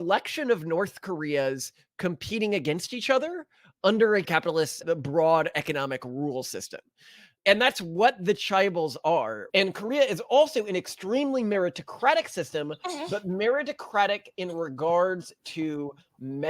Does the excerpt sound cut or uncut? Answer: cut